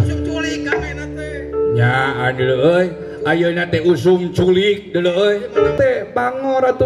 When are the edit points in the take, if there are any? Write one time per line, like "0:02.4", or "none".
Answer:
0:05.7